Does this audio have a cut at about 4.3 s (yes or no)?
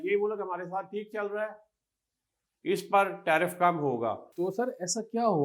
yes